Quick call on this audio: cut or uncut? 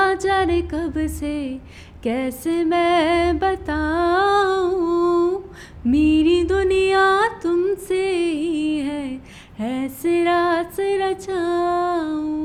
uncut